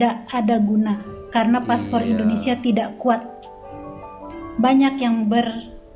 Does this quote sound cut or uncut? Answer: uncut